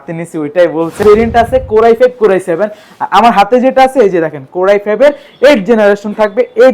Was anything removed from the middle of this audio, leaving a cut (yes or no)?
yes